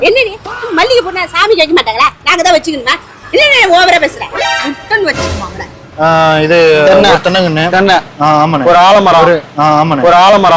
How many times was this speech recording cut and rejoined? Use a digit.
1